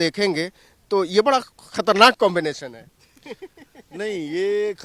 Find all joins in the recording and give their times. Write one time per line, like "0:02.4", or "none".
none